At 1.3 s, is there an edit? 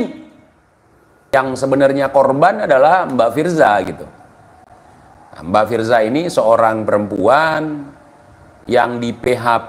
yes; 1 cut; at 1.3 s

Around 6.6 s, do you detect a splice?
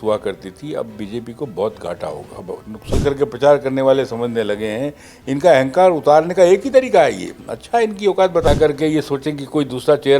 no; 2 cuts; at 2.9 s, 8.5 s

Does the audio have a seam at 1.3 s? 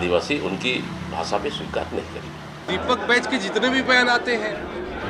no; 1 cut; at 2.7 s

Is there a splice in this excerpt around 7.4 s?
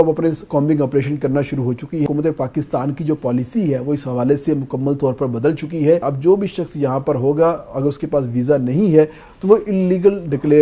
no; 2 cuts; at 2.1 s, 6.1 s

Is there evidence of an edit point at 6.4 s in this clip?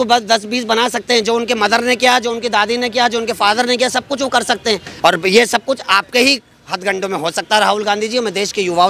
no; 1 cut; at 4.9 s

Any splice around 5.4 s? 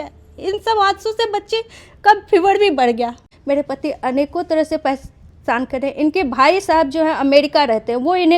no; 1 cut; at 3.2 s

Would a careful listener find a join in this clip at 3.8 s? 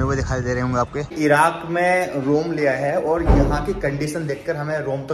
no; 1 cut; at 1.1 s

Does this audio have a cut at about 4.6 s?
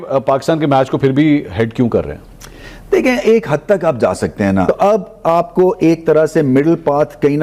yes; 1 cut; at 4.6 s

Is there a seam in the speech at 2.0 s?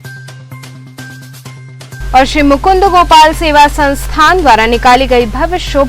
yes; 1 cut; at 2.0 s

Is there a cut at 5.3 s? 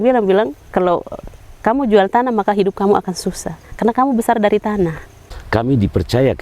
yes; 1 cut; at 5.3 s

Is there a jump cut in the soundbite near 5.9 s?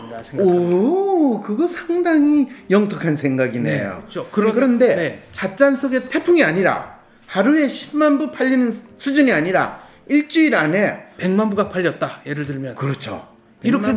no; 1 cut; at 4.2 s

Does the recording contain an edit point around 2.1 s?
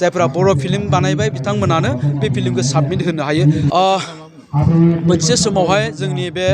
no; 1 cut; at 3.7 s

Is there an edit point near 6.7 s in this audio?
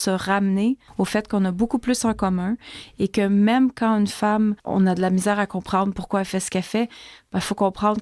no; 2 cuts; at 0.9 s, 4.6 s

